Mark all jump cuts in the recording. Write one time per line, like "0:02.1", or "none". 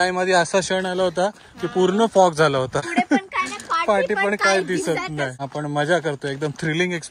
0:02.9
0:05.4